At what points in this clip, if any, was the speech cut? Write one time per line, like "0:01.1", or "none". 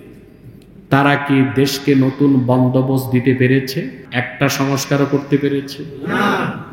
0:04.0